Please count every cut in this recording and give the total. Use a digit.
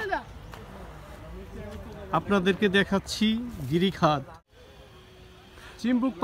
1